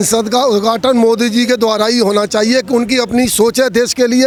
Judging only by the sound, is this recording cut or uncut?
uncut